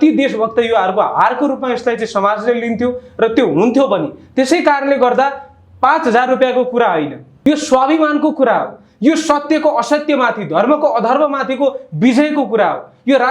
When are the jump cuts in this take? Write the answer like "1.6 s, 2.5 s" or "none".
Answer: 7.3 s

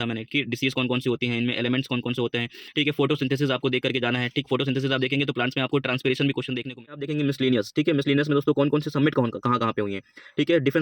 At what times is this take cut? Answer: 7.0 s

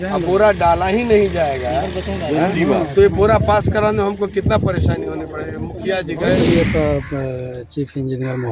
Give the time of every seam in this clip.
6.4 s

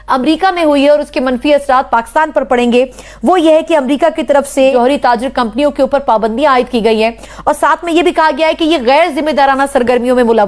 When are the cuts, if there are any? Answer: 4.7 s

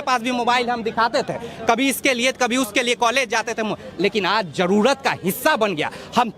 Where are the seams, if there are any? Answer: none

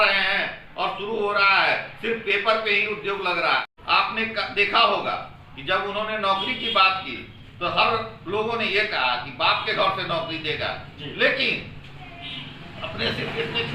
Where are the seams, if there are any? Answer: 3.7 s

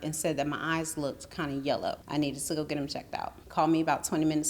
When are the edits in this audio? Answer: 2.0 s, 3.4 s

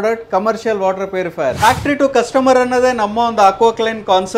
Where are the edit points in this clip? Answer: 1.6 s

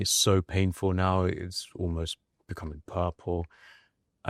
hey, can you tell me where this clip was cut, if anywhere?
none

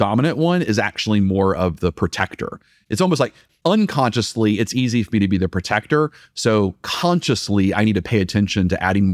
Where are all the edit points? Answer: 2.7 s

